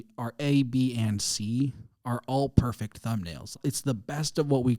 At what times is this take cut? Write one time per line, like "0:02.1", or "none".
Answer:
0:03.5

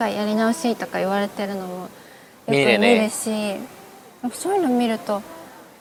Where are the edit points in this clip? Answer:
none

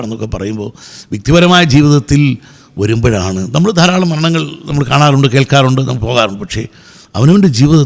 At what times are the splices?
none

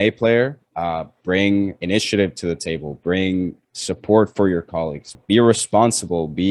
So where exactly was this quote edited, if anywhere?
0:05.1

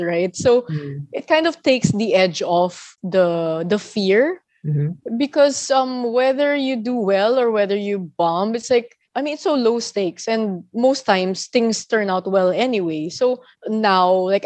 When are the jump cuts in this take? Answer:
none

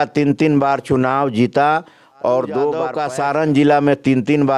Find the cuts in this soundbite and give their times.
0:03.0

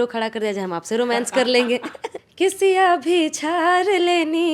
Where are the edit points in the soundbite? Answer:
0:02.2

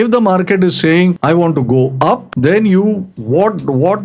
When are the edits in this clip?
0:01.2
0:02.3
0:03.1

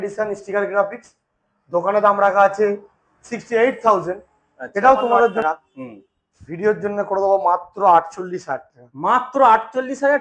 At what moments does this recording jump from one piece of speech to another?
0:05.4

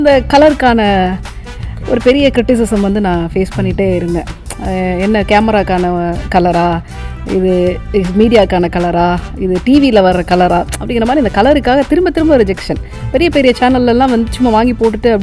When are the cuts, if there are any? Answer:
none

